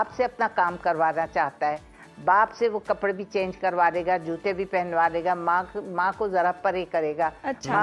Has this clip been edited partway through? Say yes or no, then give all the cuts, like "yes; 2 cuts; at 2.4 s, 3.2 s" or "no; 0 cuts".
no; 0 cuts